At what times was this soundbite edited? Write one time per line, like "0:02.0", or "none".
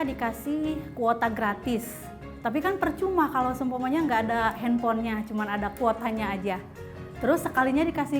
none